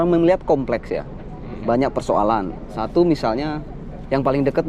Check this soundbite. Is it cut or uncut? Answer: uncut